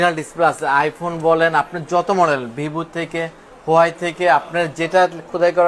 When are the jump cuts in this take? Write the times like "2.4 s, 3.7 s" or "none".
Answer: none